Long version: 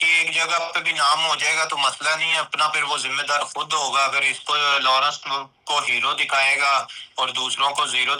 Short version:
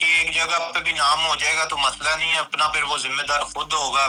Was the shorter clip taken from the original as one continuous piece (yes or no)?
yes